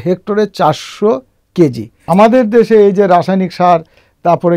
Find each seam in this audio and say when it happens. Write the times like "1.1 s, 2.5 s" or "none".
1.9 s